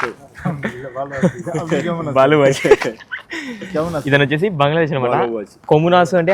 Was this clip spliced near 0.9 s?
no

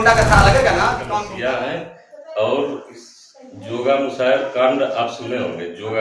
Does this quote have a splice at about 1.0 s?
yes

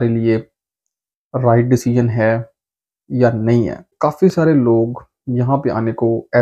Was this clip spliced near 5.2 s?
no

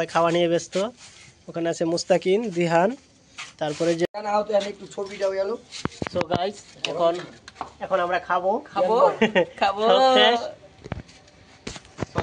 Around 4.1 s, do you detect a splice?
yes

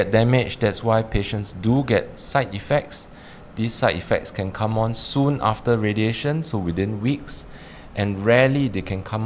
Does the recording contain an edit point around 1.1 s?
no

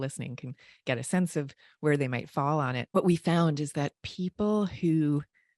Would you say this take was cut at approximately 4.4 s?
no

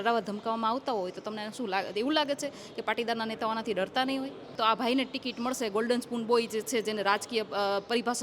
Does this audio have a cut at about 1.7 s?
no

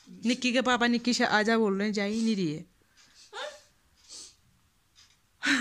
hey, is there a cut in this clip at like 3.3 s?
no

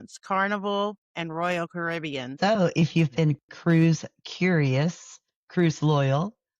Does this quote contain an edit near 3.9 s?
no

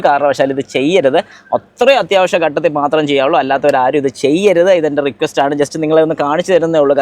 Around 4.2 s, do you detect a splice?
no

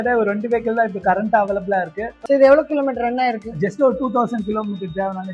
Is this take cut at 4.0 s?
no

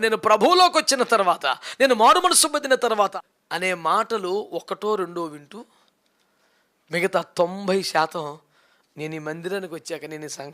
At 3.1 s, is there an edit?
yes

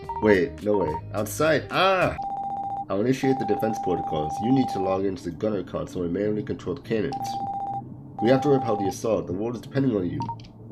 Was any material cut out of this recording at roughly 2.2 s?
yes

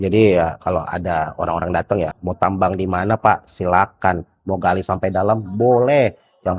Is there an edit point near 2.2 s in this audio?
yes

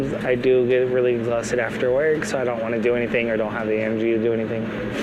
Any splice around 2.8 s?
no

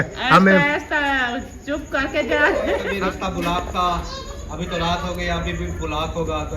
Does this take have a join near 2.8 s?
yes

